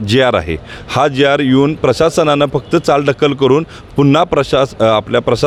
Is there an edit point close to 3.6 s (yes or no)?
no